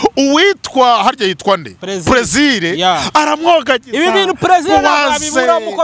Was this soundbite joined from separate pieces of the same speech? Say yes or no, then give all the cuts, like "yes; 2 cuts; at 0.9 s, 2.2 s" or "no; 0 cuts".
no; 0 cuts